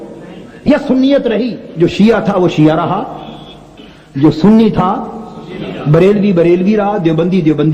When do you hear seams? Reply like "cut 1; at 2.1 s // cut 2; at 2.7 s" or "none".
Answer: cut 1; at 1.6 s